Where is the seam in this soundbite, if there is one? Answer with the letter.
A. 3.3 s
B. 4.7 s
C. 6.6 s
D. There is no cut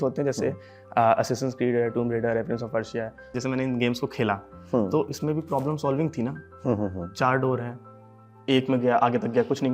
A